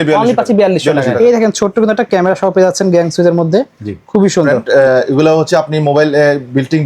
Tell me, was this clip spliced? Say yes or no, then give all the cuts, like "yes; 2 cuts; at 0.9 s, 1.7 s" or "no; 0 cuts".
yes; 2 cuts; at 1.1 s, 4.6 s